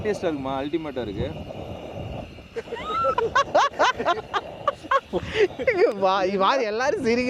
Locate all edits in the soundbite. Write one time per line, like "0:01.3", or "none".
none